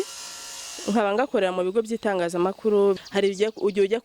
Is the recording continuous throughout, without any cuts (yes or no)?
no